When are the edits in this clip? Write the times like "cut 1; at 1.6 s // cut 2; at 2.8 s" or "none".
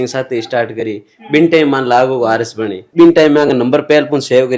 cut 1; at 2.9 s